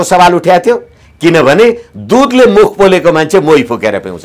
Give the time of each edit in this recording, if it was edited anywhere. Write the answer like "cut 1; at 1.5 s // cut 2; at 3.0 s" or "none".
none